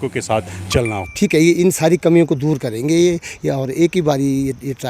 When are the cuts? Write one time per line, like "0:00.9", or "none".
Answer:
0:01.0